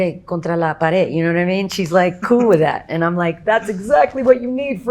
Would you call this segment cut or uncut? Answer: cut